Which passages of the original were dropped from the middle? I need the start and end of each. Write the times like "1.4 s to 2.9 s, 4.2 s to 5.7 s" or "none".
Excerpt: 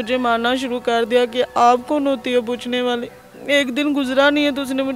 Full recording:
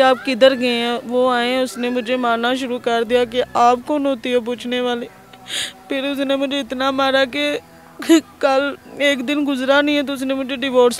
5.3 s to 8.8 s